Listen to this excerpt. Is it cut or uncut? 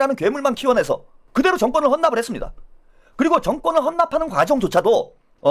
uncut